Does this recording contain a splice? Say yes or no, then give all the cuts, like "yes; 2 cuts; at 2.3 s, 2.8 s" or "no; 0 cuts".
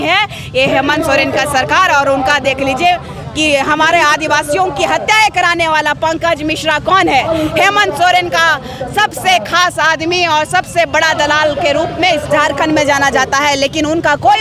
no; 0 cuts